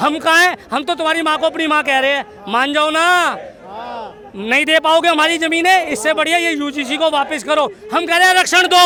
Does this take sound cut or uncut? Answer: uncut